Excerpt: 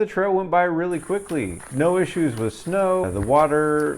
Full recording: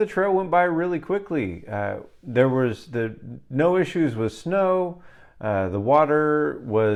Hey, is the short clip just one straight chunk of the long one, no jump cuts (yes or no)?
no